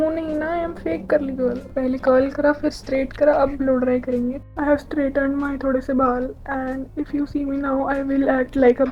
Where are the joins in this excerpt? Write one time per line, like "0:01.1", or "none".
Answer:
0:01.6
0:04.5